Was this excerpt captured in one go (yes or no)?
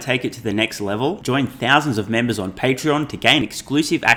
yes